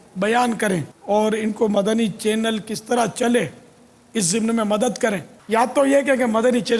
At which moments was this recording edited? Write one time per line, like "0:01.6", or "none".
0:00.9
0:05.3